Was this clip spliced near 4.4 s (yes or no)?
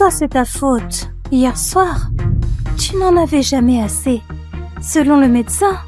no